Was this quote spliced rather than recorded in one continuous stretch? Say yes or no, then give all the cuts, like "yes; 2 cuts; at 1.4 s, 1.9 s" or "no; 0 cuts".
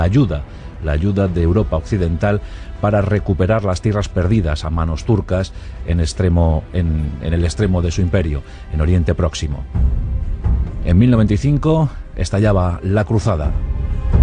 no; 0 cuts